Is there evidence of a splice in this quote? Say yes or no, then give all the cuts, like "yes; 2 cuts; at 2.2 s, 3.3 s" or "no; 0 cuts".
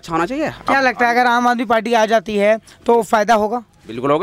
no; 0 cuts